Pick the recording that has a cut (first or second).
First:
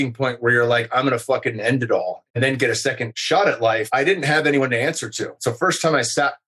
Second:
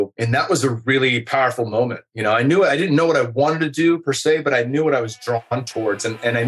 first